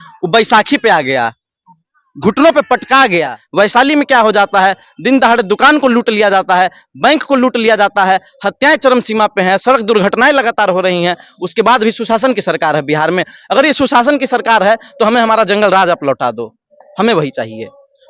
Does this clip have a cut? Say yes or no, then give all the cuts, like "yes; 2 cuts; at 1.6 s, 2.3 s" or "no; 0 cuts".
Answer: yes; 1 cut; at 3.4 s